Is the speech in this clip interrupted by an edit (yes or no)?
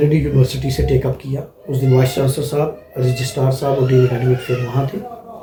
no